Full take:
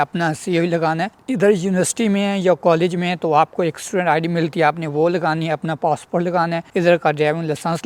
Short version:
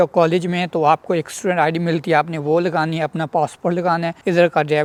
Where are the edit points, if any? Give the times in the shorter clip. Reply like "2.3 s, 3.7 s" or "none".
none